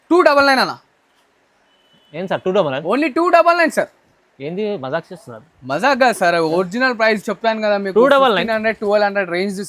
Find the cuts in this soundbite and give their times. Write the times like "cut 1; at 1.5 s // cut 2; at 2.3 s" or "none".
none